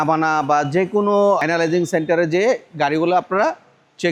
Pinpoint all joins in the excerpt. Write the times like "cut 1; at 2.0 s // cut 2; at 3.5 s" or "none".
none